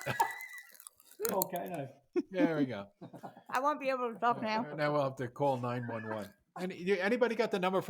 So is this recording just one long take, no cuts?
yes; 0 cuts

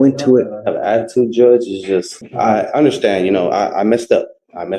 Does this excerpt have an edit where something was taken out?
yes; 1 cut; at 2.2 s

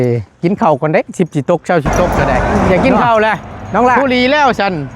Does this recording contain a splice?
yes; 1 cut; at 2.1 s

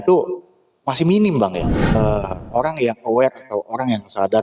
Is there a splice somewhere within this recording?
yes; 1 cut; at 1.9 s

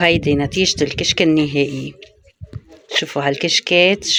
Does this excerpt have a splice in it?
no; 0 cuts

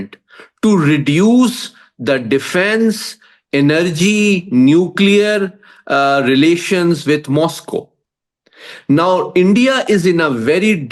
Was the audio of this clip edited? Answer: no; 0 cuts

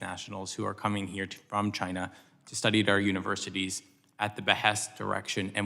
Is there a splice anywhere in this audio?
no; 0 cuts

